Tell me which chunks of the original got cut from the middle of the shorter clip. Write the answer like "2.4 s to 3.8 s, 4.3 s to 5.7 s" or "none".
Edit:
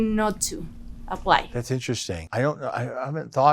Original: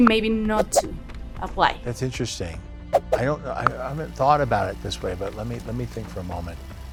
2.7 s to 3.2 s